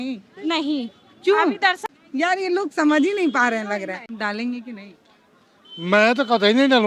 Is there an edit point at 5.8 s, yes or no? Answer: no